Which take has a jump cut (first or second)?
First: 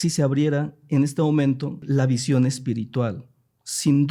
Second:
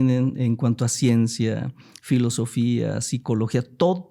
first